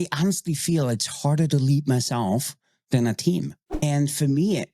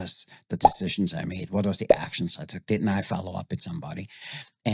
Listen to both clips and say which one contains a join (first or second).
first